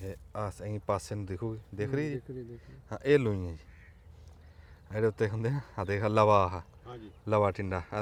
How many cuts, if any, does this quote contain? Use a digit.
0